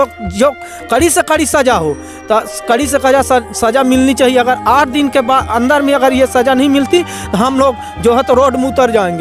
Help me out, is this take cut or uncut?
uncut